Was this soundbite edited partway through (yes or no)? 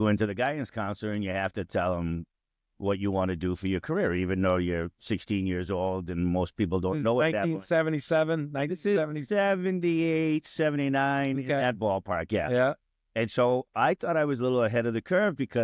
no